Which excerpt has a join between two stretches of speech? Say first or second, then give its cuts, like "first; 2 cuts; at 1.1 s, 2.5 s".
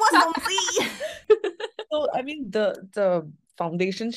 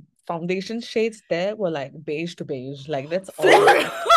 first; 1 cut; at 1.2 s